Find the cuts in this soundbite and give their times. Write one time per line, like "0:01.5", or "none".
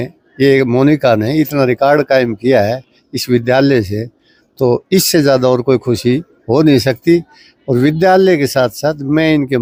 none